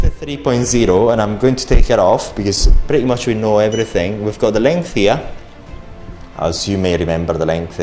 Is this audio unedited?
yes; 0 cuts

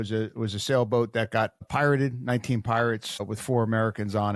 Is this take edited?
yes; 2 cuts; at 1.7 s, 3.2 s

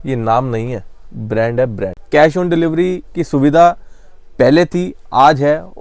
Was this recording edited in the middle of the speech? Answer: yes; 1 cut; at 1.9 s

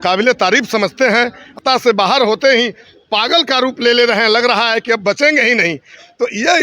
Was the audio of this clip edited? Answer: yes; 1 cut; at 1.6 s

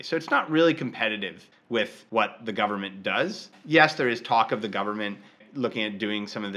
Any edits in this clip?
yes; 3 cuts; at 1.8 s, 3.5 s, 5.4 s

